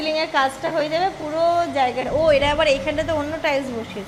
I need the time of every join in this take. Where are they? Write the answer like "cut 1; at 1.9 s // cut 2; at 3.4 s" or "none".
none